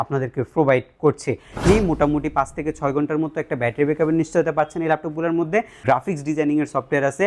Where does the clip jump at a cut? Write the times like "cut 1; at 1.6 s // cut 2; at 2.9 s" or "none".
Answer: cut 1; at 1.6 s // cut 2; at 5.8 s